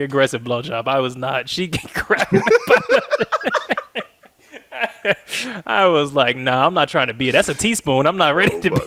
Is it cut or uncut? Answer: uncut